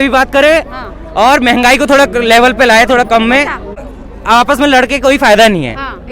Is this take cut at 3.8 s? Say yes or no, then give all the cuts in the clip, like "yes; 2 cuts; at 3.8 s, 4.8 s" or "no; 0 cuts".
yes; 1 cut; at 3.8 s